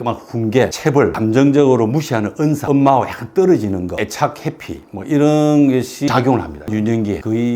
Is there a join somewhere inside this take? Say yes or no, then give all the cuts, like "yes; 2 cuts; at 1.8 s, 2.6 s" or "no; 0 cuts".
yes; 4 cuts; at 1.1 s, 2.6 s, 3.9 s, 6.6 s